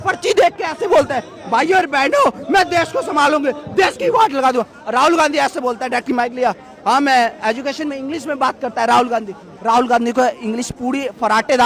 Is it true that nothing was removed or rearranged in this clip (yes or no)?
yes